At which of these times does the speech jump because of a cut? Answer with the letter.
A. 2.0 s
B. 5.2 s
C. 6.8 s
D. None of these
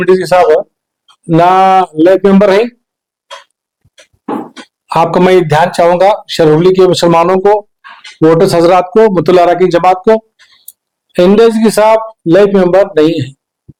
D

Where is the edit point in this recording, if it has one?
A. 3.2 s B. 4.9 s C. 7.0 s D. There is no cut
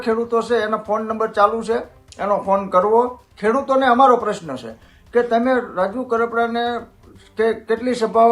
A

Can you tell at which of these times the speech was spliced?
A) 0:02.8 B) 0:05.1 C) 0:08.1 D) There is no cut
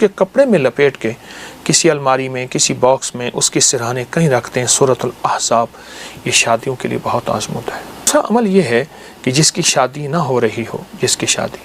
C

